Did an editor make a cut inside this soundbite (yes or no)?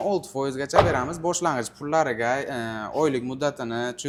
no